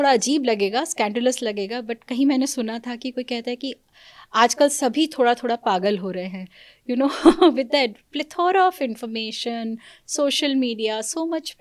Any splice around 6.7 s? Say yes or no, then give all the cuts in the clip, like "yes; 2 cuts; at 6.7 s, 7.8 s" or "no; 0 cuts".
no; 0 cuts